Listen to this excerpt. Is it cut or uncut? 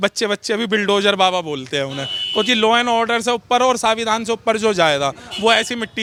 uncut